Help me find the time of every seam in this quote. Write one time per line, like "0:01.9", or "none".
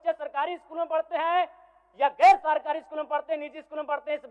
none